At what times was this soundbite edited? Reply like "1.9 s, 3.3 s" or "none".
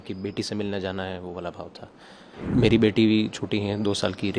2.4 s